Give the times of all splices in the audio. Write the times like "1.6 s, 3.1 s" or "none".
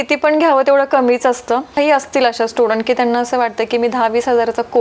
1.7 s